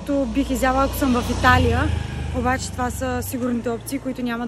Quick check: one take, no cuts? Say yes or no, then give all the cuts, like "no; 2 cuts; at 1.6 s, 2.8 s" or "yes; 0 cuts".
yes; 0 cuts